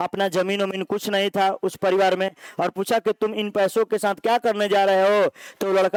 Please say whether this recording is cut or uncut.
uncut